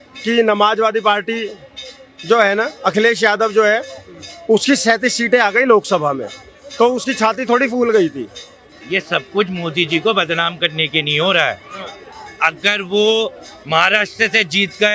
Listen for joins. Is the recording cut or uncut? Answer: cut